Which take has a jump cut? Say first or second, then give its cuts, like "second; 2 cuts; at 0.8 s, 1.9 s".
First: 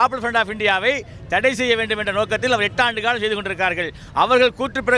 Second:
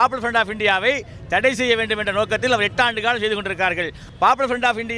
second; 1 cut; at 4.0 s